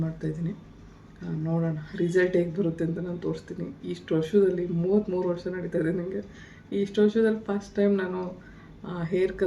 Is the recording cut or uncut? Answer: uncut